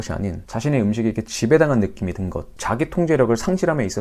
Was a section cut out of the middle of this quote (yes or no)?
no